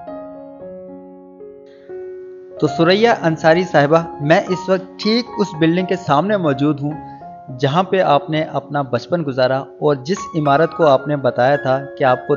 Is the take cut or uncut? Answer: uncut